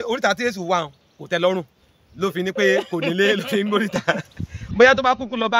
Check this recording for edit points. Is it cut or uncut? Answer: uncut